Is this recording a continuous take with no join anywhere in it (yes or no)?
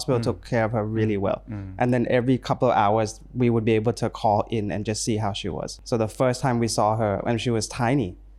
no